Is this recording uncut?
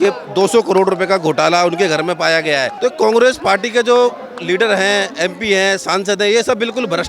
no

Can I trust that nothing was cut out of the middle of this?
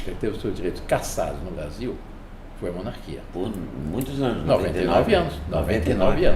yes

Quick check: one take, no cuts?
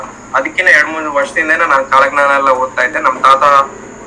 yes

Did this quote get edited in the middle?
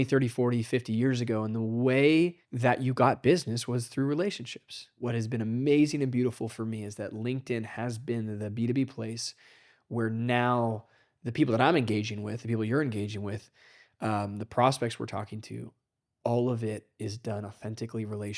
yes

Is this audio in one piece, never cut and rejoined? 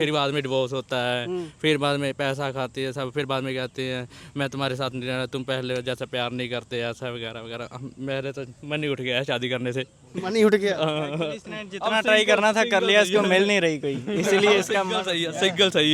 yes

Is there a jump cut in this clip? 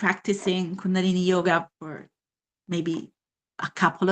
yes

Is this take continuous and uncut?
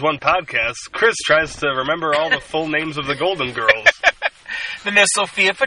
yes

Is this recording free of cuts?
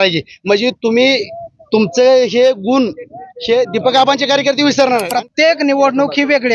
no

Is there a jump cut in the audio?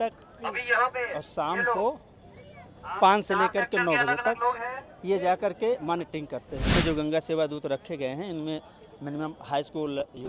yes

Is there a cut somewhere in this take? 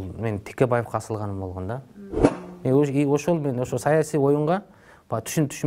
yes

